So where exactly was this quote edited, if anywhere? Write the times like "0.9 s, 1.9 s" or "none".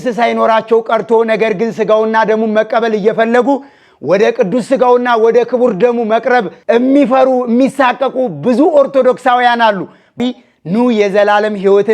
10.2 s